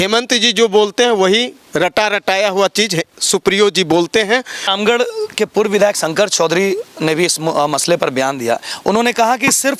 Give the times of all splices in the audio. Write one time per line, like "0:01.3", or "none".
0:04.7